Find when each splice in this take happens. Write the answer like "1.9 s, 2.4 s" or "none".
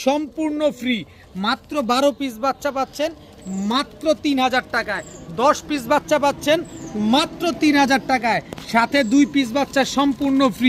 none